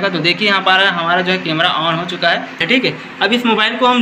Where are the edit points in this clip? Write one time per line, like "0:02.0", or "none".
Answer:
0:02.6